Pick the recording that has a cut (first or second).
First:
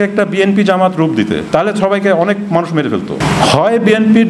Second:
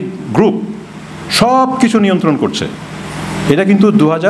first